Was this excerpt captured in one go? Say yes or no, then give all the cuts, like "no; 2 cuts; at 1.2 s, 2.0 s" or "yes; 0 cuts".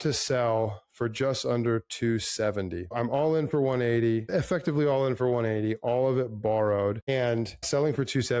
no; 1 cut; at 2.9 s